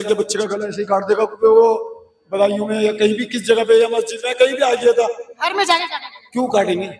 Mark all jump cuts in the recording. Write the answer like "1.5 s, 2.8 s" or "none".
none